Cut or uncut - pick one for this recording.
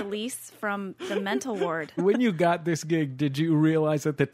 cut